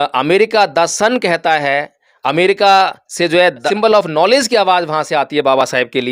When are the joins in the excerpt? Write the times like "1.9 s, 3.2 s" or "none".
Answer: 3.7 s